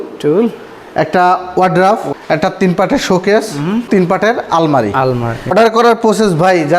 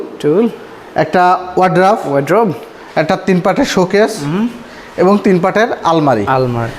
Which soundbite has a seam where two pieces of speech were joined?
first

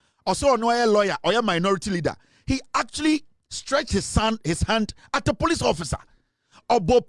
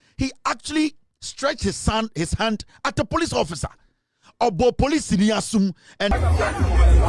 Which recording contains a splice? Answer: second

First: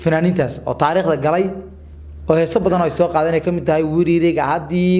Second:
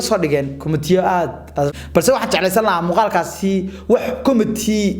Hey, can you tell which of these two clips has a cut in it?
second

